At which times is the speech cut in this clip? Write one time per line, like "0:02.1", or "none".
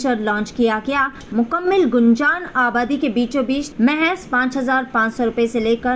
0:01.2
0:03.7